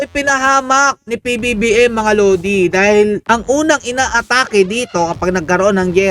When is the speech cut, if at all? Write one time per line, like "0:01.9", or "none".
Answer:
0:03.2

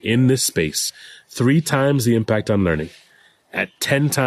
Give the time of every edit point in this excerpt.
none

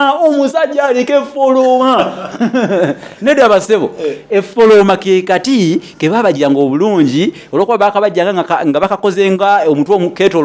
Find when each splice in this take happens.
none

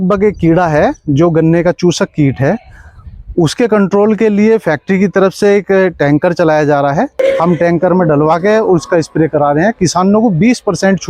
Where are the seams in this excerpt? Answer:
0:07.2

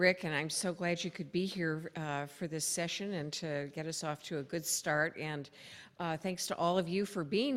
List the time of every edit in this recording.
0:06.4

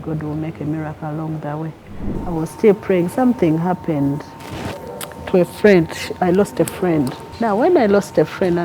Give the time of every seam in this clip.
0:02.1
0:07.2

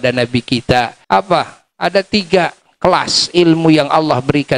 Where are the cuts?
0:01.0

